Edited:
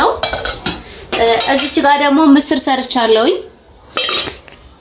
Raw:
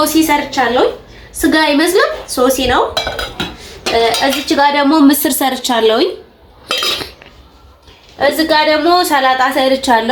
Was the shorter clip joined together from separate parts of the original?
no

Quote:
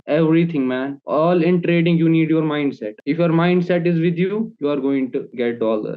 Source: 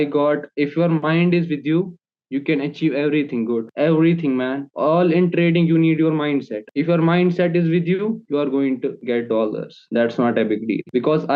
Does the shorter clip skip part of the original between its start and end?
no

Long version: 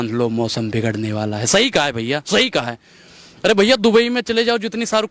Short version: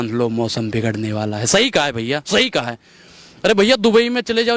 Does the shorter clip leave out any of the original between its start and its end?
no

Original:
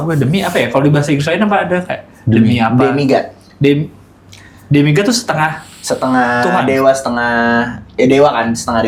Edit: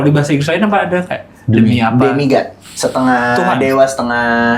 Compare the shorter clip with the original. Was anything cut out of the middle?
yes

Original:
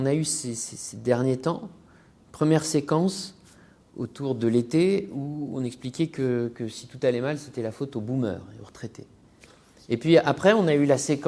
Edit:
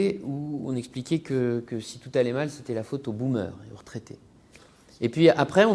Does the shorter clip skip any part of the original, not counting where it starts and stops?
no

